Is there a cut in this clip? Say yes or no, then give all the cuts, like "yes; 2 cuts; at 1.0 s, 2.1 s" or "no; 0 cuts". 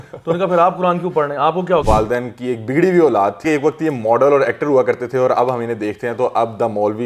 yes; 2 cuts; at 1.8 s, 3.4 s